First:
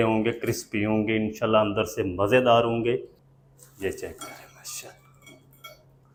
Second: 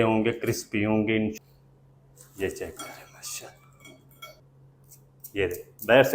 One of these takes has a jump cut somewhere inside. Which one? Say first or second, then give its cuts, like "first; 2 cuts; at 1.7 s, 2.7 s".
second; 2 cuts; at 1.4 s, 4.5 s